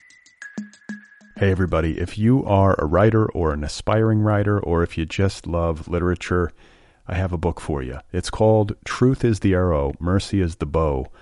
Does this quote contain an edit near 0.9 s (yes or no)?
yes